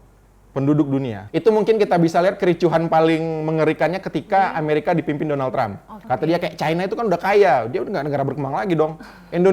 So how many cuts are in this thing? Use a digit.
2